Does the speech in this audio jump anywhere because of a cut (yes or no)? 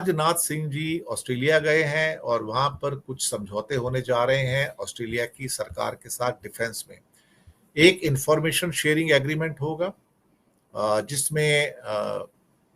no